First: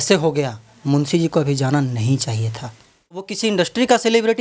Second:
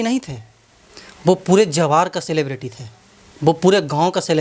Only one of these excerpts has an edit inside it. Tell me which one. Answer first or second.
first